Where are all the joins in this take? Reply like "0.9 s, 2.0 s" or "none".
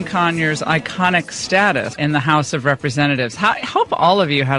1.9 s